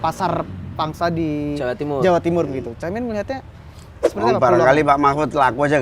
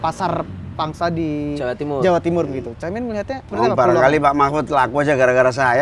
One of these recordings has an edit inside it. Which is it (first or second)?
second